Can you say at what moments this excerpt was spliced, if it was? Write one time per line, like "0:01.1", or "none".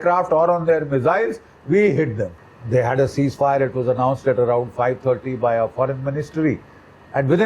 0:02.4